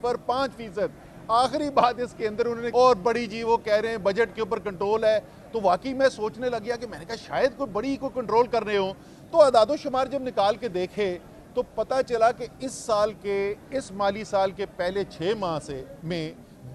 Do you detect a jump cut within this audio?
yes; 1 cut; at 2.6 s

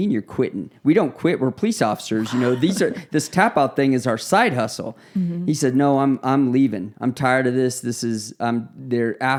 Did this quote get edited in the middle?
no; 0 cuts

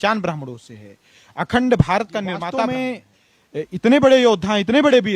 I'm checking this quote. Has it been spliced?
yes; 1 cut; at 2.4 s

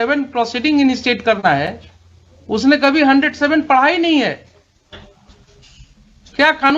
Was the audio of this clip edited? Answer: no; 0 cuts

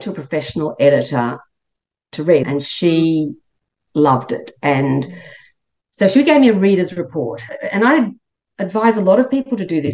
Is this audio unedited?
no; 1 cut; at 2.4 s

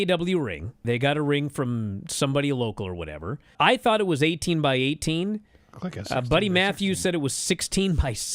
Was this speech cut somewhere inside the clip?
no; 0 cuts

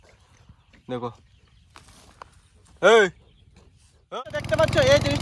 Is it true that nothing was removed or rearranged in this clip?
no; 1 cut; at 4.1 s

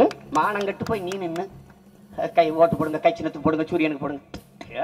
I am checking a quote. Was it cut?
no; 0 cuts

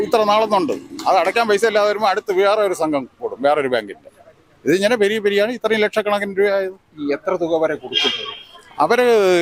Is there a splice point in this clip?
no; 0 cuts

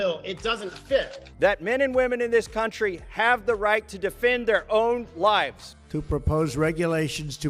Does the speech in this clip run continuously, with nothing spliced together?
no; 2 cuts; at 1.2 s, 5.9 s

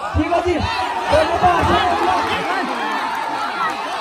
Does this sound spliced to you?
no; 0 cuts

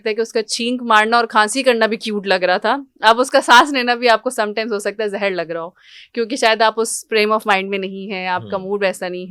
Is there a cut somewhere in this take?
no; 0 cuts

